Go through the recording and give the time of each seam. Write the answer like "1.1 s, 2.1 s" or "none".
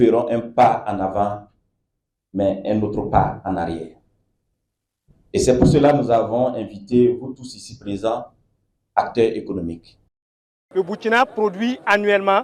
10.7 s